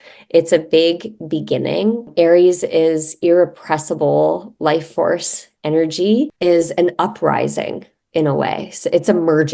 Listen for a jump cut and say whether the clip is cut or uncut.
cut